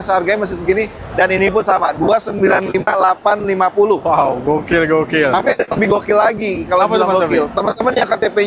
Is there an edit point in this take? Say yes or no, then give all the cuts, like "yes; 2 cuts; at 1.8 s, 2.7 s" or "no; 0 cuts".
no; 0 cuts